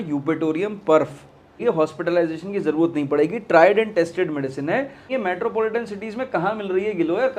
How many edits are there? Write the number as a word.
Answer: two